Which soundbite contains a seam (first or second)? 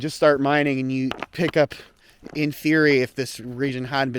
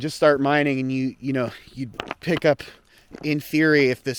first